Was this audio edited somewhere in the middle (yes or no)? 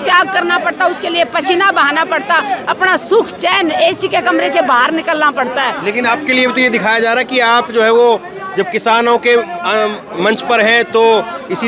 no